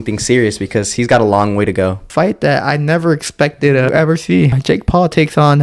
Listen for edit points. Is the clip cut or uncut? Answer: cut